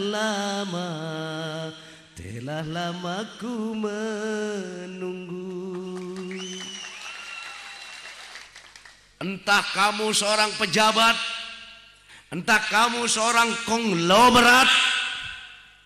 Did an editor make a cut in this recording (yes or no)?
yes